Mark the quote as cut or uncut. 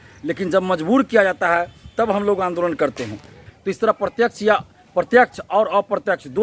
cut